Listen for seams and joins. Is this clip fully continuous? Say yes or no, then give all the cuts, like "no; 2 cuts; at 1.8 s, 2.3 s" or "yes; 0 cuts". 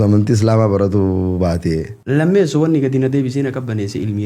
no; 1 cut; at 1.9 s